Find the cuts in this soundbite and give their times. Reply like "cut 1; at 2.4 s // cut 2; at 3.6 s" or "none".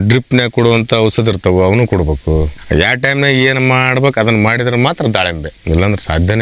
none

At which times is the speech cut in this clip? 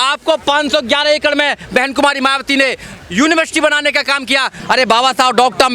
cut 1; at 4.5 s

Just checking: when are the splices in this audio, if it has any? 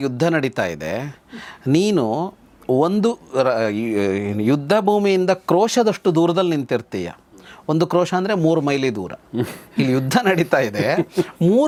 none

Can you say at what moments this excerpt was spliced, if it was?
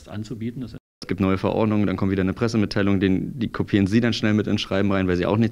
cut 1; at 1.0 s

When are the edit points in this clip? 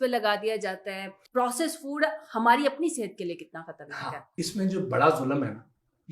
cut 1; at 1.2 s // cut 2; at 4.4 s

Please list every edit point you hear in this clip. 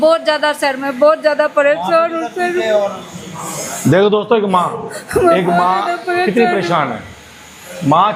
none

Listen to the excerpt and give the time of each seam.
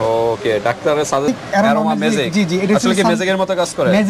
cut 1; at 1.3 s

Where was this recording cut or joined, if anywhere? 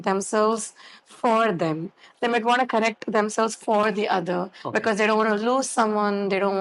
none

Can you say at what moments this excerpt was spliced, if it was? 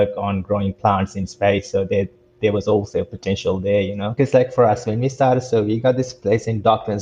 cut 1; at 4.1 s

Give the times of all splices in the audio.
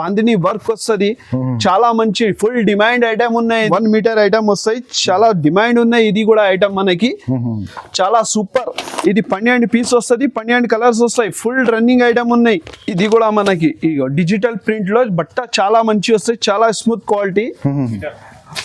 cut 1; at 3.7 s // cut 2; at 12.7 s

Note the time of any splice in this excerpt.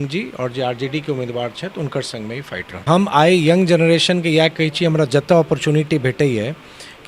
cut 1; at 2.8 s

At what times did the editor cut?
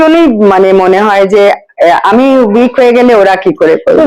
none

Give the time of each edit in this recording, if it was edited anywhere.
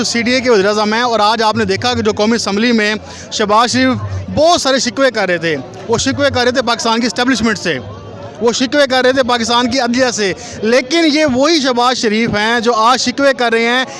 none

